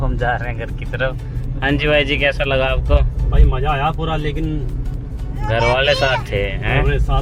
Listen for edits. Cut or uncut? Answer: uncut